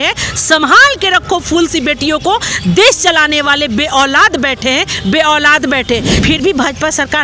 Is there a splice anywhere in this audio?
yes; 1 cut; at 6.1 s

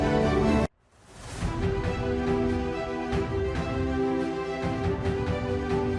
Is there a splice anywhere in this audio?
no; 0 cuts

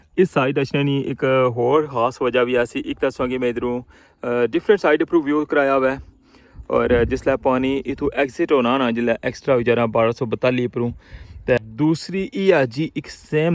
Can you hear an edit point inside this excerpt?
yes; 1 cut; at 11.6 s

